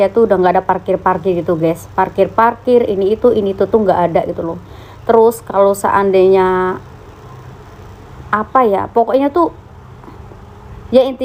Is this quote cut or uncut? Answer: uncut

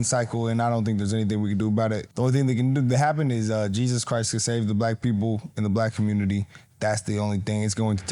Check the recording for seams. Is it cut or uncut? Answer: uncut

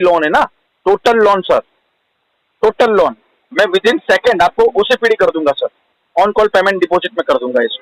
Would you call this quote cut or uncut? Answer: uncut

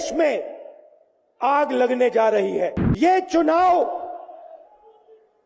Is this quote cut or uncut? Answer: cut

